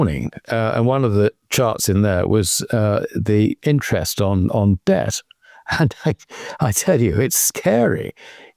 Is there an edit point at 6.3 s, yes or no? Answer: no